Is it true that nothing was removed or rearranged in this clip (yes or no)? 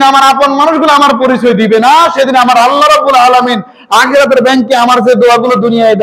yes